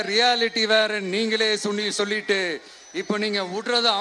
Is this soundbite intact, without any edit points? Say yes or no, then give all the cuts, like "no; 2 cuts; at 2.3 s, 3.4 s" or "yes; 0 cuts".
yes; 0 cuts